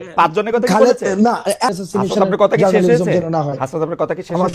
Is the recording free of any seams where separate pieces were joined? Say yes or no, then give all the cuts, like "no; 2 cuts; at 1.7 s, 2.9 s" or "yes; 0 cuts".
no; 1 cut; at 1.7 s